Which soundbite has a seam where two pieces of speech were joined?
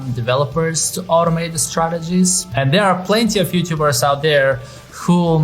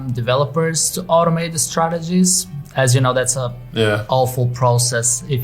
first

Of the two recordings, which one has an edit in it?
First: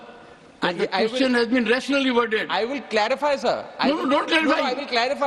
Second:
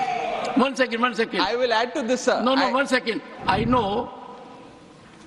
second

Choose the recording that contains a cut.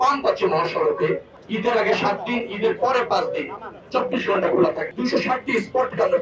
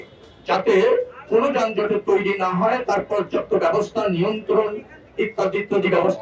first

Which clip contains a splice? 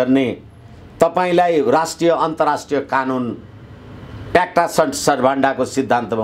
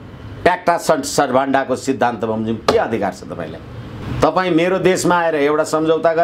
second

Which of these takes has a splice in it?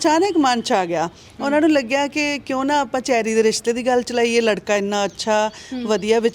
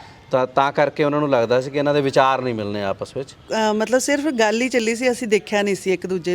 second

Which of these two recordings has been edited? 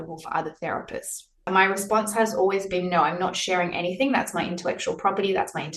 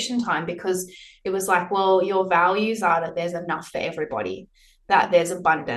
first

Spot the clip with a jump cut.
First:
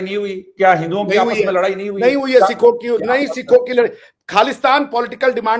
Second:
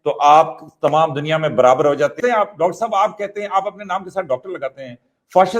second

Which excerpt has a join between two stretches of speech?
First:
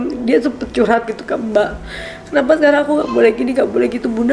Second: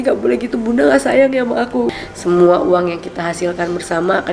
second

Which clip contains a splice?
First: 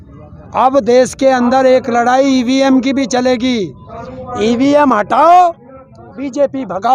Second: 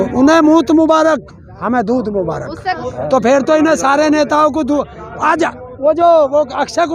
second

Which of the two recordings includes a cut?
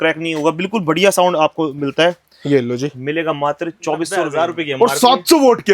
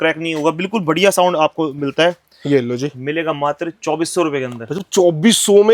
first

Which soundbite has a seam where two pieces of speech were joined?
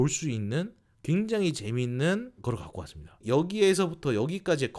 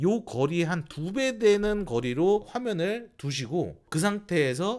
first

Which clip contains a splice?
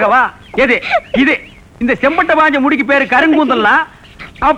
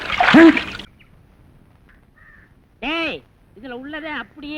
second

